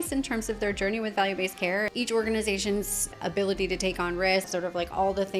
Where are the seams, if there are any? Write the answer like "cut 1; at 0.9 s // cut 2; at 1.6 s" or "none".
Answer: cut 1; at 1.9 s // cut 2; at 3.1 s // cut 3; at 4.5 s